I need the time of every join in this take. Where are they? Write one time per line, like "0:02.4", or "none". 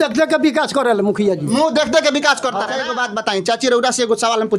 0:02.8

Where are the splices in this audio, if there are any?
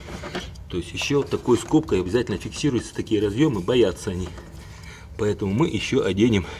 none

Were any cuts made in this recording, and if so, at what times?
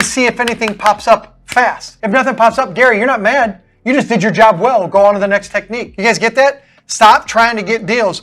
0:01.9
0:05.8

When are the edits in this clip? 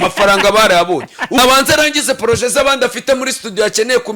0:01.4

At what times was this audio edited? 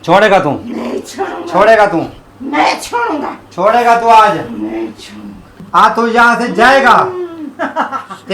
0:05.6

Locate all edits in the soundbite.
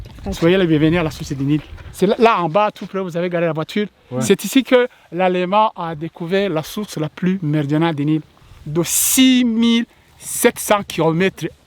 0:01.8
0:08.3

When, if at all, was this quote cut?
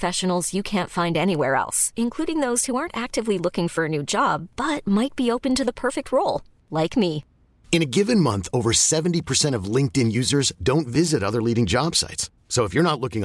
none

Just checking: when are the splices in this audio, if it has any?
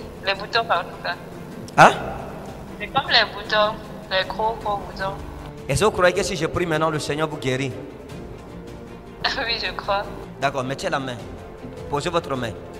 0:05.3

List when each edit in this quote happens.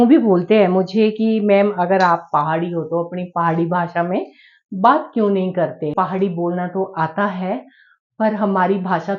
0:05.9

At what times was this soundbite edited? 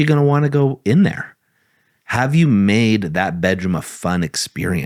none

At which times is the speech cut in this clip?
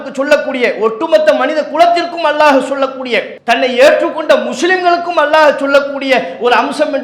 0:03.3

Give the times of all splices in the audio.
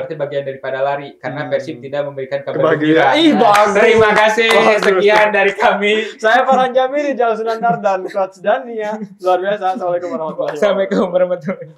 none

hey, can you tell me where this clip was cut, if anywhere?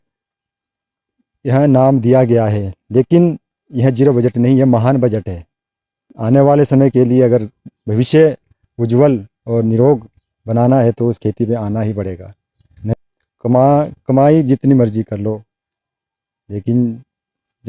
0:06.1
0:12.7

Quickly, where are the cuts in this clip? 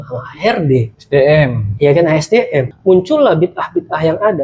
0:02.7

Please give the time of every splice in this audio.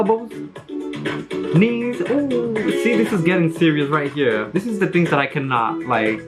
none

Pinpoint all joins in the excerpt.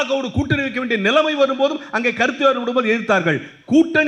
none

